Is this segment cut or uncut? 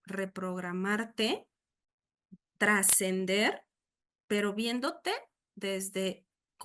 uncut